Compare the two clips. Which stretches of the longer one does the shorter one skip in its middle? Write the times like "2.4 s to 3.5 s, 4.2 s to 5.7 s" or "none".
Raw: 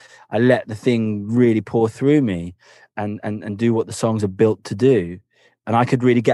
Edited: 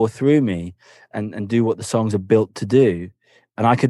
2.9 s to 3.2 s